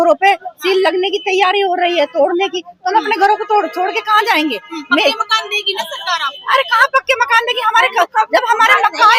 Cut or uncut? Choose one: uncut